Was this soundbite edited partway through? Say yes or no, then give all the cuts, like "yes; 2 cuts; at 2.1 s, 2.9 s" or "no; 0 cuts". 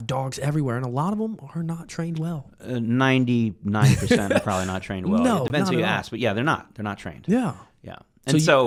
no; 0 cuts